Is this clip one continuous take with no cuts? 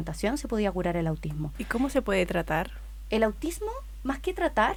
yes; 0 cuts

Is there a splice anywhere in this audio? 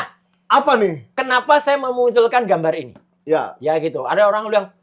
no; 0 cuts

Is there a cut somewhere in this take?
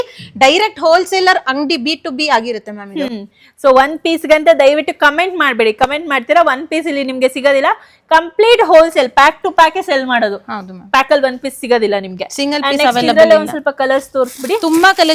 no; 0 cuts

